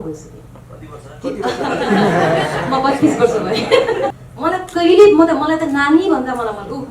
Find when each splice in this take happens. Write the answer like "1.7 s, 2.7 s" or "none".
4.2 s